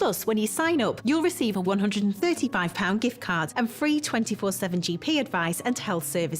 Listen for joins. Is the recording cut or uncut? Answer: cut